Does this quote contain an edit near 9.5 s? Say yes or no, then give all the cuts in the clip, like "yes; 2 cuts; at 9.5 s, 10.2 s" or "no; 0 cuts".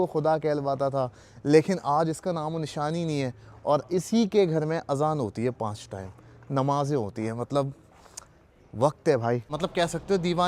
yes; 1 cut; at 9.5 s